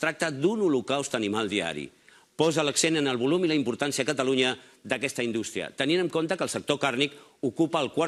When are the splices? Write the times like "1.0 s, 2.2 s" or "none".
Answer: none